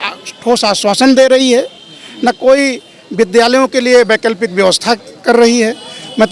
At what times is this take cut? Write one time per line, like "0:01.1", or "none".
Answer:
none